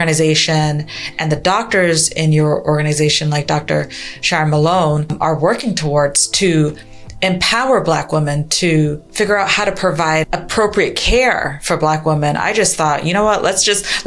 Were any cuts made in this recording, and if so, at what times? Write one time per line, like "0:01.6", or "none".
0:05.1
0:09.0
0:10.3